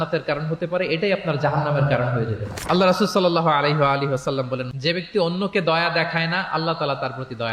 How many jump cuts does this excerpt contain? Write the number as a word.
one